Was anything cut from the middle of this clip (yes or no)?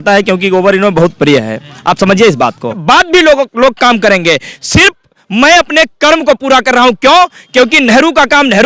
yes